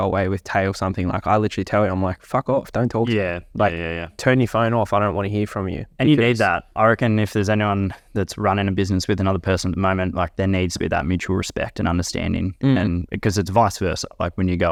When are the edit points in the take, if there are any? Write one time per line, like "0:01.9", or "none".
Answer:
none